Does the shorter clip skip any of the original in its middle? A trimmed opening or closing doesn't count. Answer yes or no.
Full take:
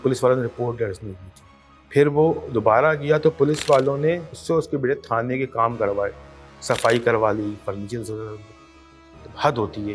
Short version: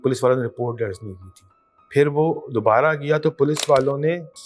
no